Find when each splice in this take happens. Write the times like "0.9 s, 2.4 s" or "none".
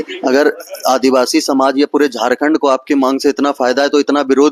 none

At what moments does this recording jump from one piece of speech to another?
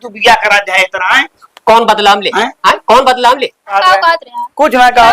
3.8 s

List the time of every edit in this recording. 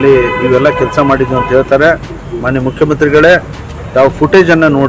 none

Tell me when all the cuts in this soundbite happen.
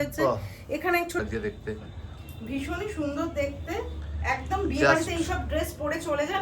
1.2 s

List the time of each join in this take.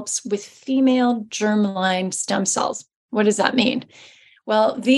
none

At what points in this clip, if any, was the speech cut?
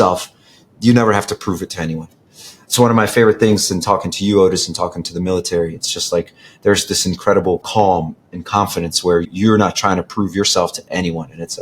7.7 s, 9.3 s

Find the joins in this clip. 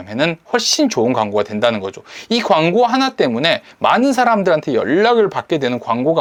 none

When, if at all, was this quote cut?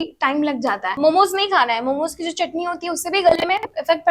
1.0 s

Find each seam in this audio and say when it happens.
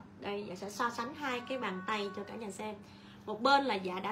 none

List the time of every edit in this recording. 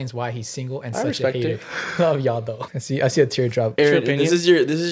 2.6 s, 3.7 s

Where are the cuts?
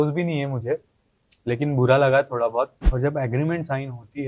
2.8 s

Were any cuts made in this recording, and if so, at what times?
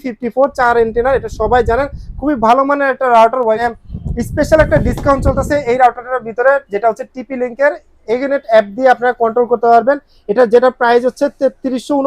3.6 s

